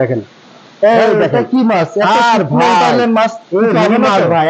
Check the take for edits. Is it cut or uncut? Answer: uncut